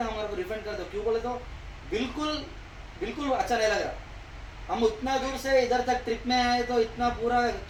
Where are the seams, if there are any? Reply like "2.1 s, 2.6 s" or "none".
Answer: none